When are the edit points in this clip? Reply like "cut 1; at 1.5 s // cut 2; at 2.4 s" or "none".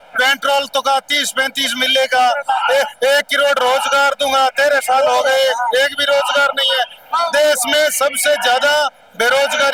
none